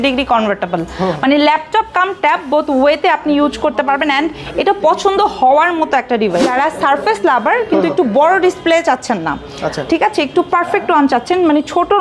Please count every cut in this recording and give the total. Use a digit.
1